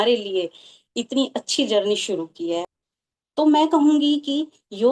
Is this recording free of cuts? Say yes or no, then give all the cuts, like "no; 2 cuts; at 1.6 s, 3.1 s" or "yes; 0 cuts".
no; 1 cut; at 2.7 s